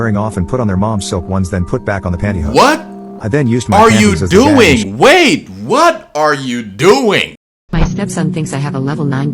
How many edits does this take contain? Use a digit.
1